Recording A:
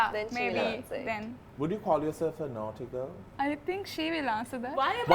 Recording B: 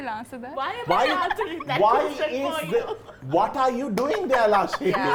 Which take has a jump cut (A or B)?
A